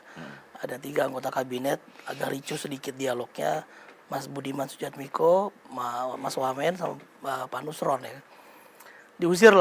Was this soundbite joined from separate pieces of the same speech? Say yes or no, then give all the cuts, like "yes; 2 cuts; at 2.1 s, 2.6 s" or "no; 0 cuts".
no; 0 cuts